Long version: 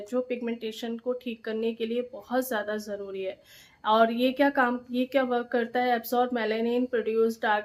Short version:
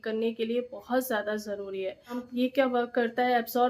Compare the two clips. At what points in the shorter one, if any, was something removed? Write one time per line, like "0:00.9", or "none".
0:02.2